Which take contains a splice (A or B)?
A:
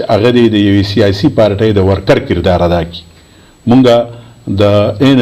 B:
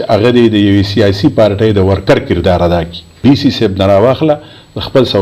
B